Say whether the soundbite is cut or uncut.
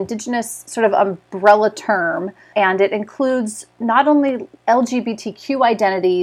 uncut